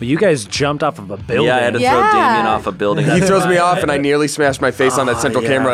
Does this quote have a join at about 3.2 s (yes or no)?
yes